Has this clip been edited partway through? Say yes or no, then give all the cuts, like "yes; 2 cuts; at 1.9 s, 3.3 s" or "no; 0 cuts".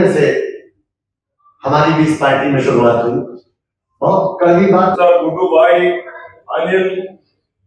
yes; 1 cut; at 4.9 s